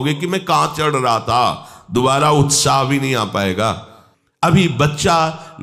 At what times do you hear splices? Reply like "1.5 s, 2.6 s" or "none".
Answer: 4.5 s